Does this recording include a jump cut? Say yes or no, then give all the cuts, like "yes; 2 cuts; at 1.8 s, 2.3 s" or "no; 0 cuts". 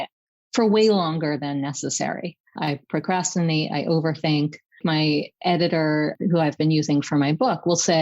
yes; 3 cuts; at 2.7 s, 4.8 s, 6.1 s